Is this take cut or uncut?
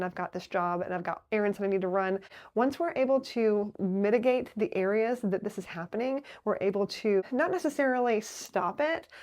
cut